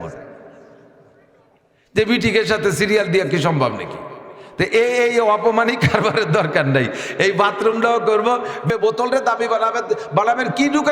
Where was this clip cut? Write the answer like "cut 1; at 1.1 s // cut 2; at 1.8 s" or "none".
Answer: cut 1; at 8.7 s